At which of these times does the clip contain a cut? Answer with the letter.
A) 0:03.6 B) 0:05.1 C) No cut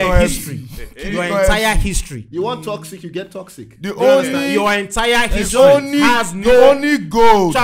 C